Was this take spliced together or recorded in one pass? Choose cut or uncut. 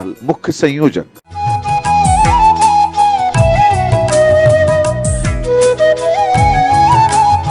cut